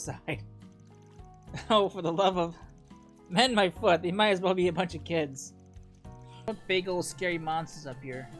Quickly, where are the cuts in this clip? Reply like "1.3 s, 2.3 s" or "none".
6.5 s